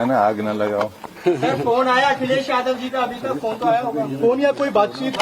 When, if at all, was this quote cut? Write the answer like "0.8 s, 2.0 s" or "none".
none